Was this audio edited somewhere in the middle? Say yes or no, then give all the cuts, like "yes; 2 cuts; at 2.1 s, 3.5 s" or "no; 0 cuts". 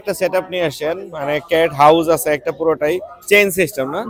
no; 0 cuts